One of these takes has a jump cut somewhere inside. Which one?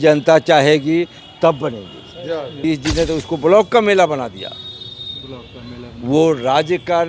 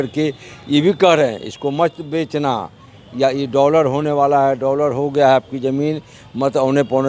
first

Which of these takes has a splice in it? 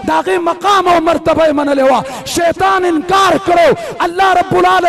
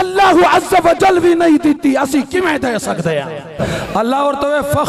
second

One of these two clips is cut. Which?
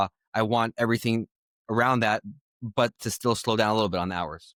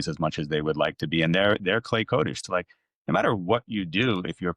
second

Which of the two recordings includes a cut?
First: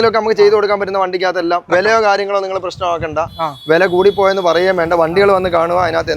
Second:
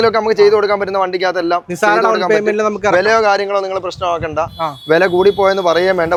first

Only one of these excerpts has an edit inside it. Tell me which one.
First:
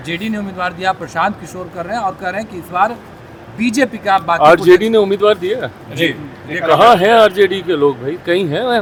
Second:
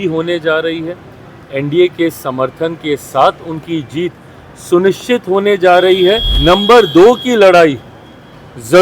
second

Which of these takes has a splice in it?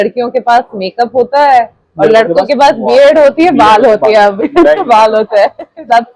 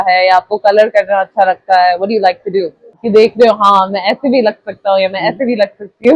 second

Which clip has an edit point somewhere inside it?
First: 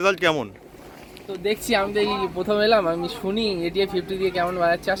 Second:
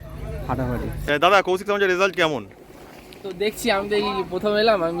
second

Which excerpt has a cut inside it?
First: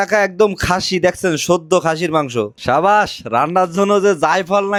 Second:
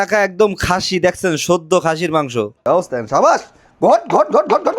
second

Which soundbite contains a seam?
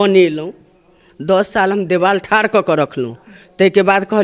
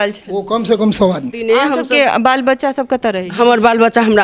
second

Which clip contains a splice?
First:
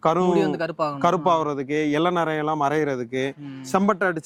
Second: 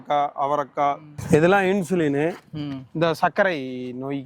second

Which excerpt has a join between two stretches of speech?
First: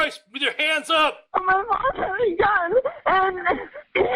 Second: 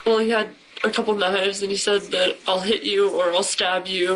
first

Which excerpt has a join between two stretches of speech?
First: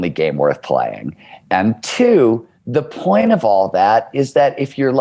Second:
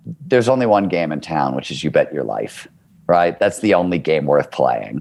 first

